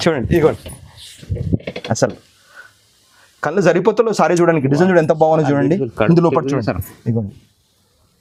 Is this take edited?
no; 0 cuts

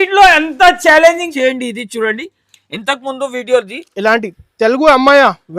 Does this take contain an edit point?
yes; 1 cut; at 1.3 s

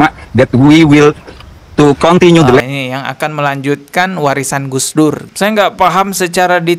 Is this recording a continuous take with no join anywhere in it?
no; 1 cut; at 5.3 s

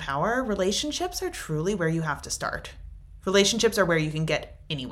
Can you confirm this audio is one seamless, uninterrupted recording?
yes; 0 cuts

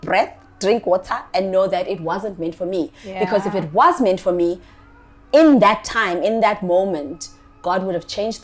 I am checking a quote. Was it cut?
no; 0 cuts

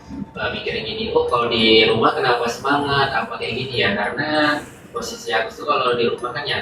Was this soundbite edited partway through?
no; 0 cuts

